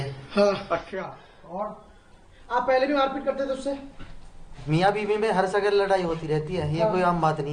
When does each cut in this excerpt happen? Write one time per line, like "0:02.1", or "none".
none